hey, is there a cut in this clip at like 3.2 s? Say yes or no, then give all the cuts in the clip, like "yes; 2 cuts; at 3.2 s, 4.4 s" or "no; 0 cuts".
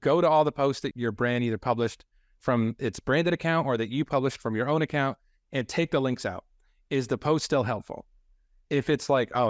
no; 1 cut; at 0.9 s